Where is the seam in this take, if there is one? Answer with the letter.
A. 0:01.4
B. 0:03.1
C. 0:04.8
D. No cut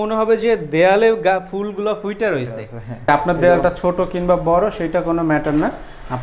B